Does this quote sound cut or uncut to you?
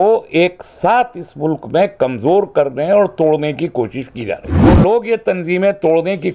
cut